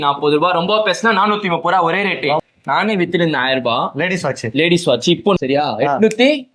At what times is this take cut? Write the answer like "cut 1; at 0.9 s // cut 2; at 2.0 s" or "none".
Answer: cut 1; at 2.4 s // cut 2; at 5.4 s